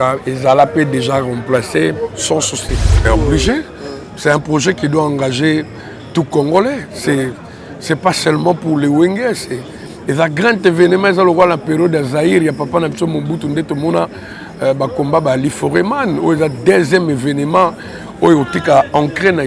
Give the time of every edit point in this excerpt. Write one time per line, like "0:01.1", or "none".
0:03.0

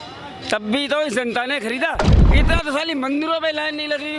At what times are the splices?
0:02.2

